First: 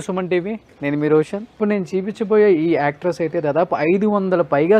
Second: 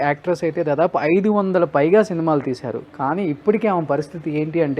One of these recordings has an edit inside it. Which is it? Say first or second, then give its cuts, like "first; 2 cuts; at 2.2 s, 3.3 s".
first; 1 cut; at 1.5 s